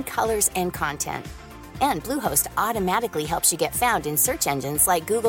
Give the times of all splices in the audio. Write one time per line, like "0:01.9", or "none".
none